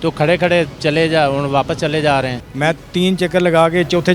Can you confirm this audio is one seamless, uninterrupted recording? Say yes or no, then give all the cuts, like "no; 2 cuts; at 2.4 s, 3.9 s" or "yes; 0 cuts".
no; 1 cut; at 2.4 s